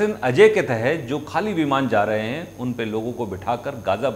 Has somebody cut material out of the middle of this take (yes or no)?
no